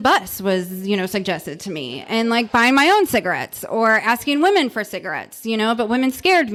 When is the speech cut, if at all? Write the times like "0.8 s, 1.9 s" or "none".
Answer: none

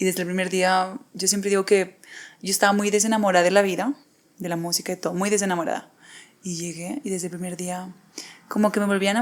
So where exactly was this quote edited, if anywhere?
none

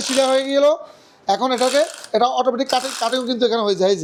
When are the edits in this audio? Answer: none

